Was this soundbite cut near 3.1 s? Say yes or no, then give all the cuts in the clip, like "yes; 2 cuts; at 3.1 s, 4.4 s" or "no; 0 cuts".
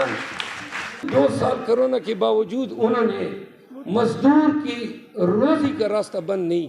no; 1 cut; at 1.0 s